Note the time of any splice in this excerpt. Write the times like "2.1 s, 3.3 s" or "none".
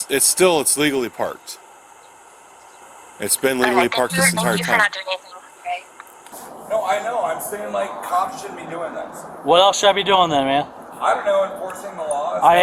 2.8 s, 6.2 s